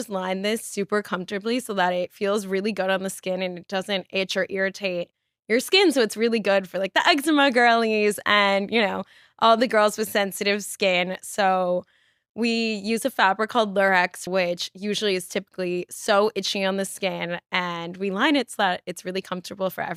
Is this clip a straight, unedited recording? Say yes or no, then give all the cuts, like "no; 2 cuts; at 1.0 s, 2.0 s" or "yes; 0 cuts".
yes; 0 cuts